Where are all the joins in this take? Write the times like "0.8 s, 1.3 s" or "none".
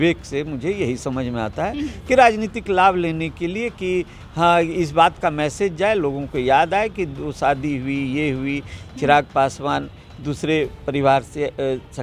none